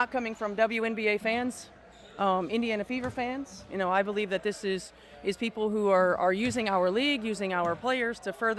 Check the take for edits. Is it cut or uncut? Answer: uncut